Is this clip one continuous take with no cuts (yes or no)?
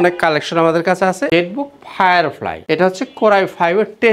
no